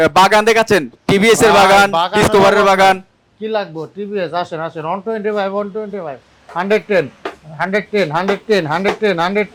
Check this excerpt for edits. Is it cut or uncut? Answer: uncut